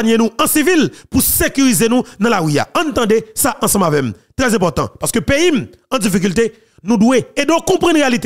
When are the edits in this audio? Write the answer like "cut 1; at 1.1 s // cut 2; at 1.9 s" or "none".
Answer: none